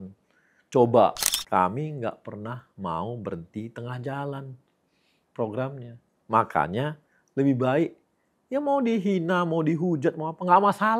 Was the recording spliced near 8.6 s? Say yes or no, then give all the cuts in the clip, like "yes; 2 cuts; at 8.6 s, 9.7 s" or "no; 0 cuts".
no; 1 cut; at 1.3 s